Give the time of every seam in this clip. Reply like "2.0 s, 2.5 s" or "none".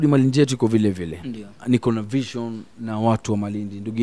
1.6 s